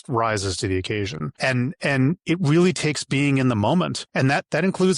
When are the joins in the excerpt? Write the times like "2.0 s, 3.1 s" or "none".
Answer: 1.3 s, 4.0 s